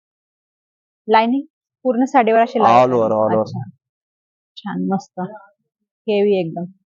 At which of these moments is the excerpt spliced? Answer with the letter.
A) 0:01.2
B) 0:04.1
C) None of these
C